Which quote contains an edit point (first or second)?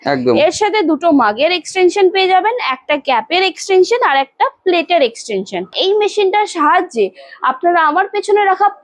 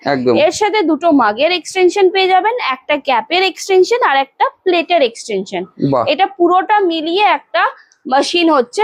first